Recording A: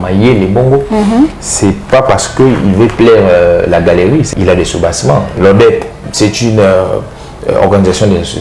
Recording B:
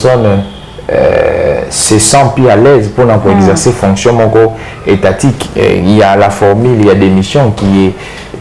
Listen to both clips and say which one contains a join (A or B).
A